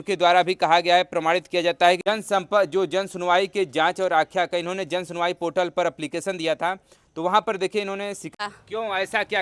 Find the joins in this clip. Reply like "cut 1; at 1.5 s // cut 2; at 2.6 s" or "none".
cut 1; at 2.0 s // cut 2; at 8.3 s